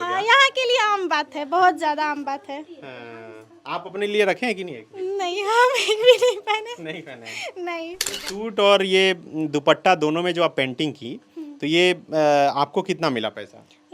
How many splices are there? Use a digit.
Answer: 1